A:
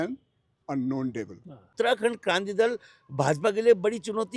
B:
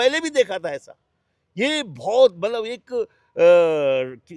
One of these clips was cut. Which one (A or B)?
A